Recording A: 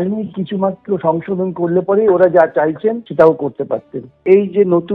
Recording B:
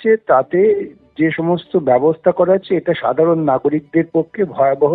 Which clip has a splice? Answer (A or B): A